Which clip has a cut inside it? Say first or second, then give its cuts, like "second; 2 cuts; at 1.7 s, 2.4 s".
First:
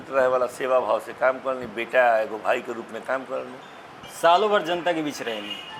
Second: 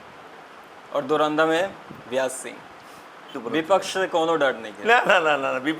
second; 1 cut; at 3.3 s